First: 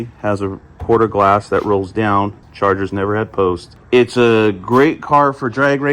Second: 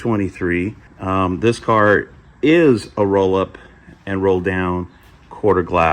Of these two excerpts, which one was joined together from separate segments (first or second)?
first